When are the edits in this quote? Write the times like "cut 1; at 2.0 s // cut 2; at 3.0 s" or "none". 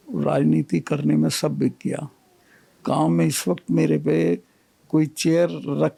none